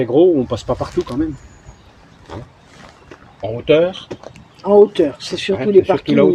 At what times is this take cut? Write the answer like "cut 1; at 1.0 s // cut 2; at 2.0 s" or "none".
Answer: none

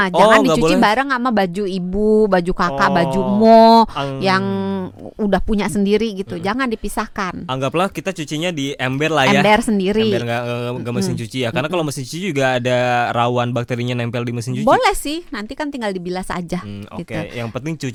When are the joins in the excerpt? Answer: none

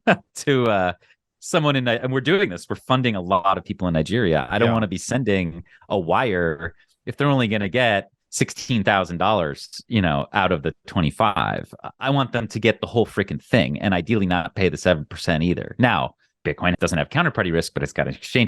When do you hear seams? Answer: cut 1; at 16.7 s

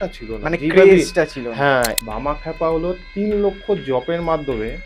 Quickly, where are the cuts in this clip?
cut 1; at 1.9 s

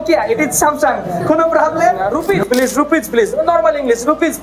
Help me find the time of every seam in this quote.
cut 1; at 2.1 s

